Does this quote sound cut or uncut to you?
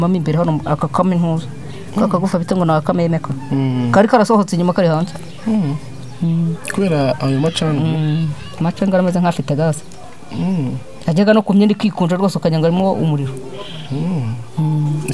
uncut